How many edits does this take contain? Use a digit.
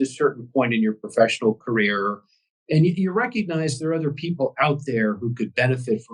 0